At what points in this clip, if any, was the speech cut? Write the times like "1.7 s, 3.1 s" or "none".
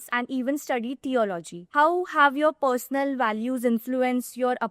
1.5 s